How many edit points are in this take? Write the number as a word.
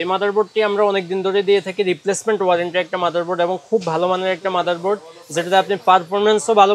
zero